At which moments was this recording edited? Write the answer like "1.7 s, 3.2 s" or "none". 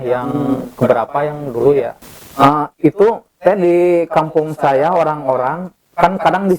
2.0 s